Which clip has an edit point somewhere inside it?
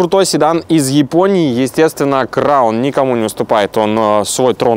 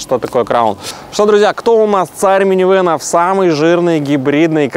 second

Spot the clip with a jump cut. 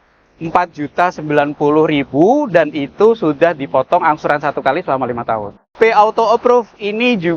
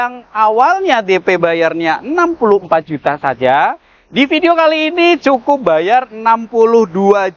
first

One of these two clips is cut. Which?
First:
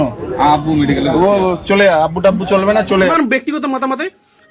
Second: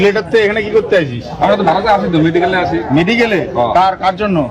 first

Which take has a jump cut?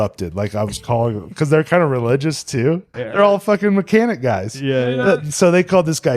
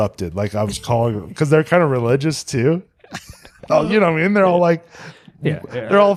first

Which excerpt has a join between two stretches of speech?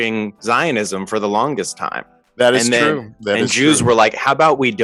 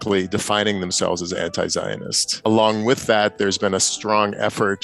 second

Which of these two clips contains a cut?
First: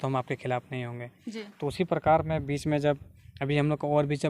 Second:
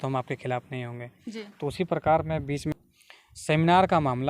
second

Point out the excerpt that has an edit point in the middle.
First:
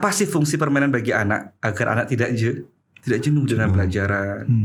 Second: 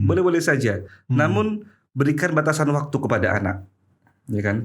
second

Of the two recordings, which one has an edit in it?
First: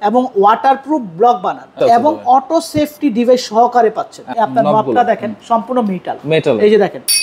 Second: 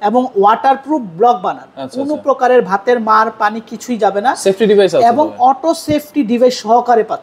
first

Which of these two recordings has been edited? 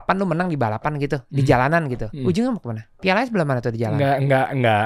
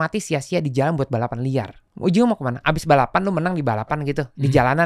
second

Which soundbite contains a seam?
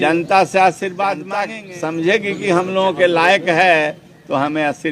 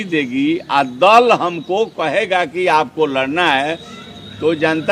first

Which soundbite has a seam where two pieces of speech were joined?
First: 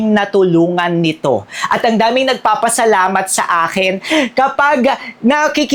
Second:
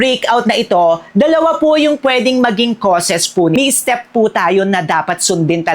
second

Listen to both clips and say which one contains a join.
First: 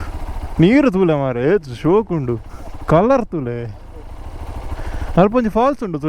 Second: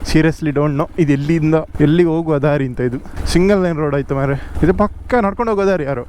second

